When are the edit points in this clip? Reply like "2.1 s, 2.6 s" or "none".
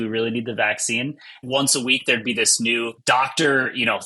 1.4 s